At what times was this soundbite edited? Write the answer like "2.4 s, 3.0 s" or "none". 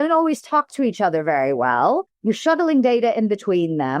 2.1 s